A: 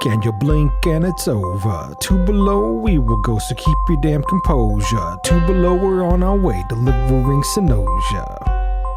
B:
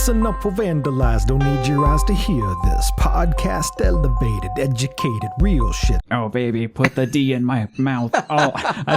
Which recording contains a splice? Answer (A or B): B